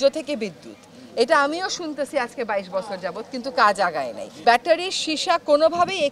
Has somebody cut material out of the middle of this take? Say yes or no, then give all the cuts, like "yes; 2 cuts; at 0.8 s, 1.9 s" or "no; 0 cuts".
yes; 1 cut; at 4.4 s